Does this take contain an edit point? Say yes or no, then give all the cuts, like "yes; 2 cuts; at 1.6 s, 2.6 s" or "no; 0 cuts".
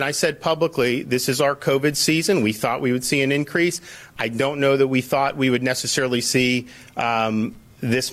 no; 0 cuts